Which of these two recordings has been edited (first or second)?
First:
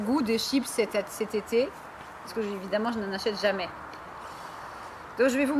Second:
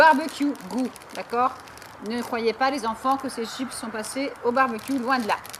first